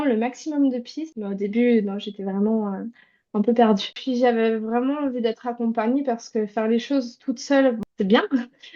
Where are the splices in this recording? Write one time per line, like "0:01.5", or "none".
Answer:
0:01.1
0:04.0
0:07.8